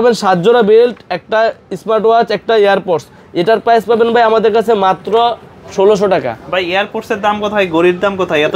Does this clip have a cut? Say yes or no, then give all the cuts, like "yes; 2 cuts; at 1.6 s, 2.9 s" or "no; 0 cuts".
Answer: no; 0 cuts